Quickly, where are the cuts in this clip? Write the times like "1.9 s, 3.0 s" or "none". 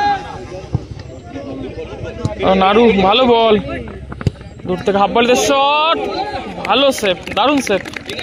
none